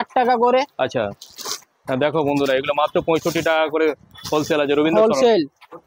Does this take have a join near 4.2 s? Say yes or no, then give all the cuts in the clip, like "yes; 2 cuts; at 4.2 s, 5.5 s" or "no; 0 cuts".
no; 1 cut; at 1.7 s